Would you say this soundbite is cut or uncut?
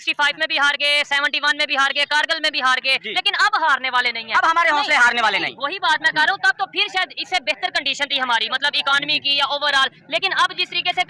uncut